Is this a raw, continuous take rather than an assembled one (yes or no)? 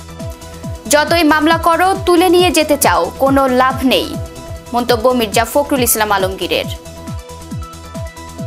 no